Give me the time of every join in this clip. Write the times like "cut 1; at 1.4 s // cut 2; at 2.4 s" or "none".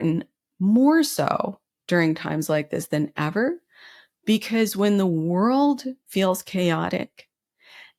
none